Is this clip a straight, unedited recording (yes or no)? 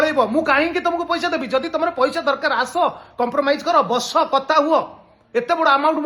yes